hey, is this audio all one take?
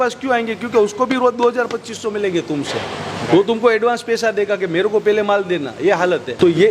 yes; 0 cuts

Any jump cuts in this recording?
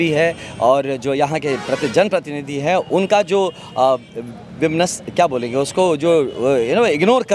no; 0 cuts

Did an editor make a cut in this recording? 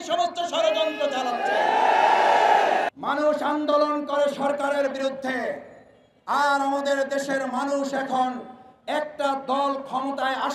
yes; 1 cut; at 2.9 s

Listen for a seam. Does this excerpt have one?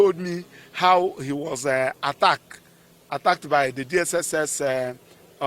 no; 0 cuts

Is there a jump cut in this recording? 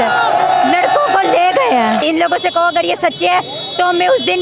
yes; 1 cut; at 2.0 s

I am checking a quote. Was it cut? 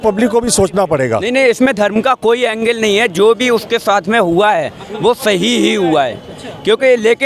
yes; 1 cut; at 1.2 s

